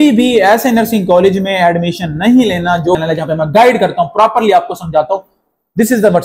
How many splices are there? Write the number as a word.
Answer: one